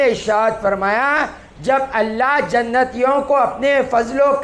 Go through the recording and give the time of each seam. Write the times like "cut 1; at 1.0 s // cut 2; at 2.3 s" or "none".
none